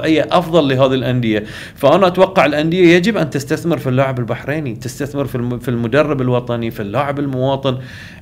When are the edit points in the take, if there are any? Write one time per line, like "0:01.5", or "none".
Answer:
none

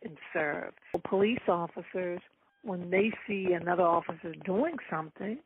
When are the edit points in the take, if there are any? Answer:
0:01.0

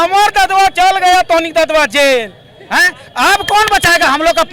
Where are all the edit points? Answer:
none

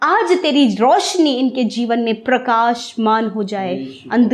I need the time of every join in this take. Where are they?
none

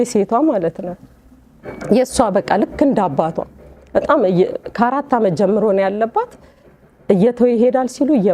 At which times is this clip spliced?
none

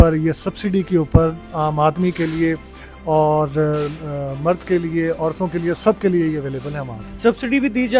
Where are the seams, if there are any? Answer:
0:07.0

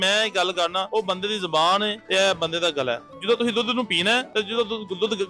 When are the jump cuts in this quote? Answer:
0:00.9
0:02.0
0:03.1
0:04.3

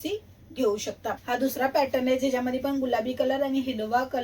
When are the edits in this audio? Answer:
0:01.2

